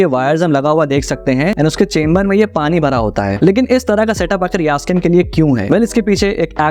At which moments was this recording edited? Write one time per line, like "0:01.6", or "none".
none